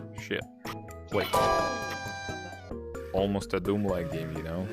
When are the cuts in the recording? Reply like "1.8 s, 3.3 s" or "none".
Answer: 2.8 s